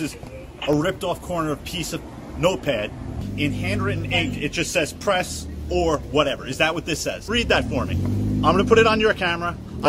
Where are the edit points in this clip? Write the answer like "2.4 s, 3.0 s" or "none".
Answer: 3.2 s, 7.2 s